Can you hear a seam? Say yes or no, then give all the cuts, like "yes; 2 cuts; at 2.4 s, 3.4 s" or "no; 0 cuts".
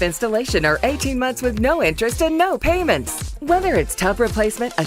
no; 0 cuts